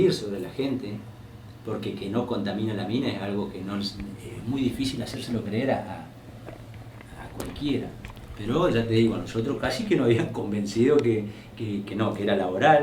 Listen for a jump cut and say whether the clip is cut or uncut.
uncut